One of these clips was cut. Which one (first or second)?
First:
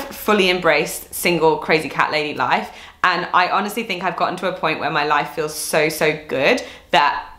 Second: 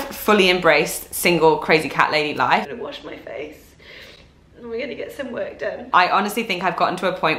second